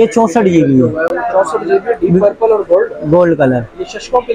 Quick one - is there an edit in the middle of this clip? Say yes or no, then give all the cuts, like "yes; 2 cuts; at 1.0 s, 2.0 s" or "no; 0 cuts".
no; 0 cuts